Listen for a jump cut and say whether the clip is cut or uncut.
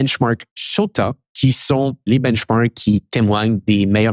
cut